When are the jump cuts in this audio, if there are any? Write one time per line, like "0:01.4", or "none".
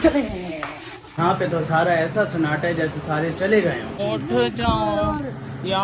0:01.2
0:03.9